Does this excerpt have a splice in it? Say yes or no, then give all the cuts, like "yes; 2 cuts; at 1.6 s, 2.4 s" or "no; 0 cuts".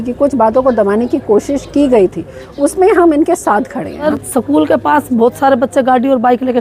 yes; 1 cut; at 4.1 s